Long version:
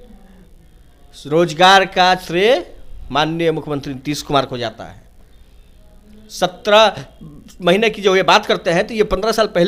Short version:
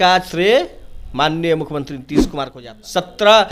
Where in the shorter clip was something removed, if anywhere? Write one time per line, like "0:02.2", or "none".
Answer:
0:02.3